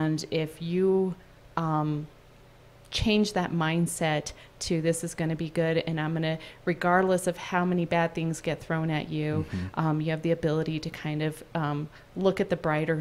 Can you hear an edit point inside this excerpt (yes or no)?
no